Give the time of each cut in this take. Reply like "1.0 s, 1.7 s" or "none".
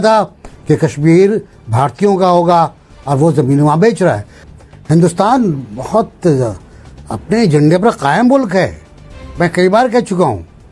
4.3 s